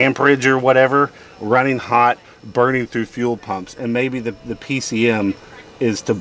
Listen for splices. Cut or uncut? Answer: uncut